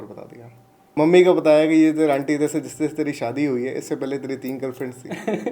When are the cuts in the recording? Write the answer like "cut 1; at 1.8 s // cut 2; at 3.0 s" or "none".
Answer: cut 1; at 1.0 s